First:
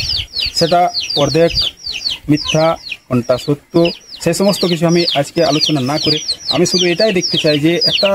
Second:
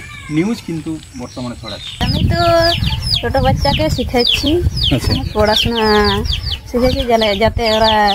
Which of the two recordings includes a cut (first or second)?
second